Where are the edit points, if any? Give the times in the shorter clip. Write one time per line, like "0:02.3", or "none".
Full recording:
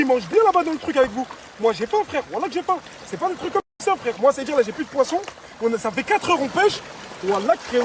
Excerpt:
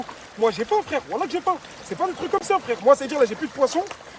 0:02.4

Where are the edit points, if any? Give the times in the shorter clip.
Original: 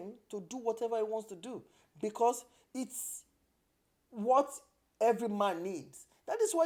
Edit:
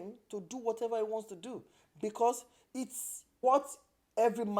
0:03.4

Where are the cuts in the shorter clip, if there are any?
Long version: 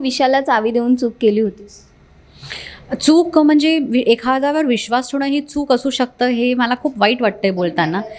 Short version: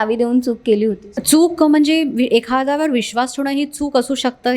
0:01.1

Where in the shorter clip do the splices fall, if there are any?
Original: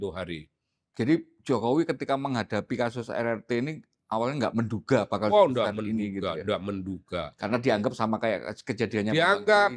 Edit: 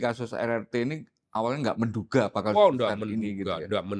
none

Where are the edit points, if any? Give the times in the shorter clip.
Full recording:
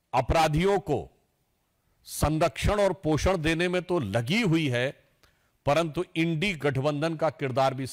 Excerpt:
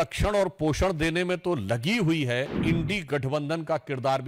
0:02.6

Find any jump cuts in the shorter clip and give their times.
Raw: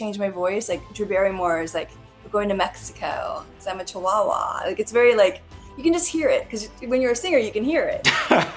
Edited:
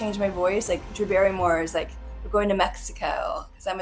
none

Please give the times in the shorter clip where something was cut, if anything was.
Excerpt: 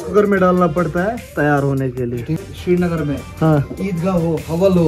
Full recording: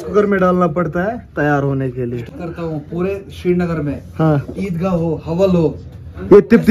0:02.5

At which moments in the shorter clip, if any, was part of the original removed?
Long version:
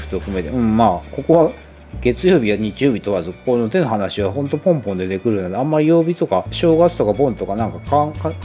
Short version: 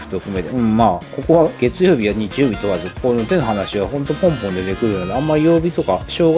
0:01.5

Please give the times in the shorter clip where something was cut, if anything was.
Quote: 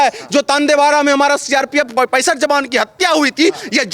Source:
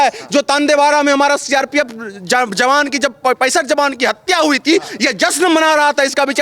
0:01.9

